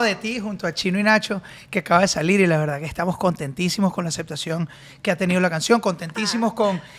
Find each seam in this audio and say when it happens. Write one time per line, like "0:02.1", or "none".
none